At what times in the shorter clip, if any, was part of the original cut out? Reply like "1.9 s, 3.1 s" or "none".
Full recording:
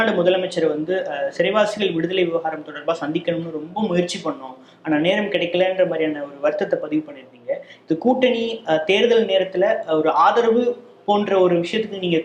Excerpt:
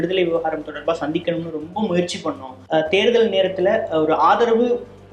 2.6 s